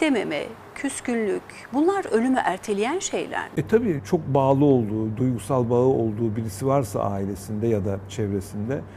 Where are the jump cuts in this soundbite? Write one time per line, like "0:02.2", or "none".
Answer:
0:03.9